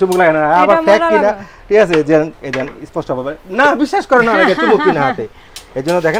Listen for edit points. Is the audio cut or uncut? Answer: uncut